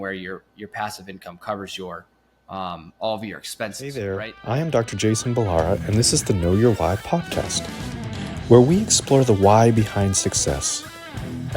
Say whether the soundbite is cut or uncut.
cut